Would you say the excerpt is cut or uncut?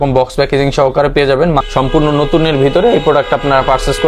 cut